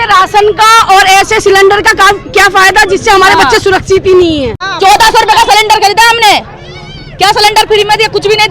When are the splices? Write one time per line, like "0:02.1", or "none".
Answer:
0:04.6